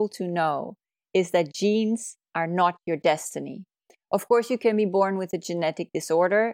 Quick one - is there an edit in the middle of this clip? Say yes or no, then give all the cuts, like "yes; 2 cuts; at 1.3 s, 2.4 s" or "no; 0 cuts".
no; 0 cuts